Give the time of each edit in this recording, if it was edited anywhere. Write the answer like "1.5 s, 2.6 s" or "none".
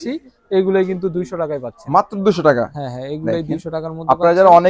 none